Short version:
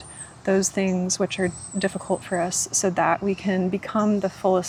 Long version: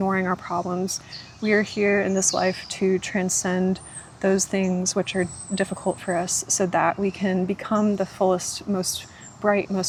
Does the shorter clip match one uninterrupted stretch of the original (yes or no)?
yes